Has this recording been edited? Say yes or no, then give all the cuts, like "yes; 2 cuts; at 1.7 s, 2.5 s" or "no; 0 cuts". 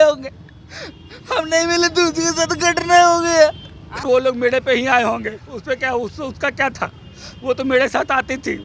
yes; 1 cut; at 4.0 s